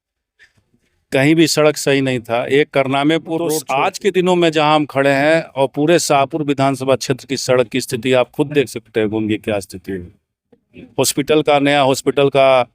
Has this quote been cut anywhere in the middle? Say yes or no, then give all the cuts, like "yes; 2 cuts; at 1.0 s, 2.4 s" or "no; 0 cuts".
yes; 1 cut; at 3.6 s